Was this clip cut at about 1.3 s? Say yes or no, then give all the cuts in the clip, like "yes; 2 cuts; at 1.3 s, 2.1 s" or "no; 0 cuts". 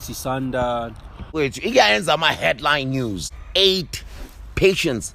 yes; 2 cuts; at 1.3 s, 3.3 s